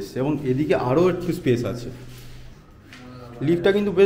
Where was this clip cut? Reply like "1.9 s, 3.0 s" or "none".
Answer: 2.5 s